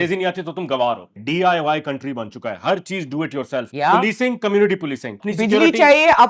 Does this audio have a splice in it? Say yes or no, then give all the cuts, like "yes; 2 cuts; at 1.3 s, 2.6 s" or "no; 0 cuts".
yes; 3 cuts; at 1.1 s, 3.7 s, 5.2 s